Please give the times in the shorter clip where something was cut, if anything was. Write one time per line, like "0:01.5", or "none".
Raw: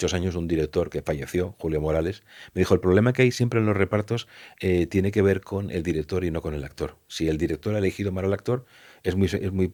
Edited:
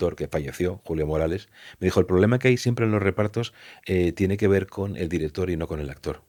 none